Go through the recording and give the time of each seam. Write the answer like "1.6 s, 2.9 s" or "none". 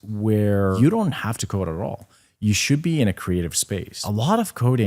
0.7 s, 3.9 s